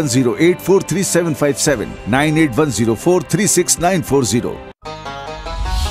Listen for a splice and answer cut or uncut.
cut